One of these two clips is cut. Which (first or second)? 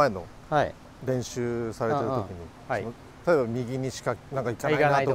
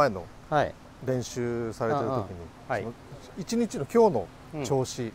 first